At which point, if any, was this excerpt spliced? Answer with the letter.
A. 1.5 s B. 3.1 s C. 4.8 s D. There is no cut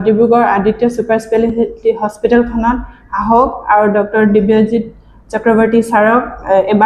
D